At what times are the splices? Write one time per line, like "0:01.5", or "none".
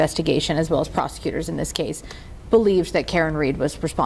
none